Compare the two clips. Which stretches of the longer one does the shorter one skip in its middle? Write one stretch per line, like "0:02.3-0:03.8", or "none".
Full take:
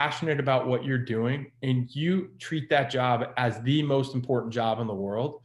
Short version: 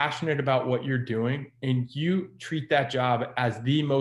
none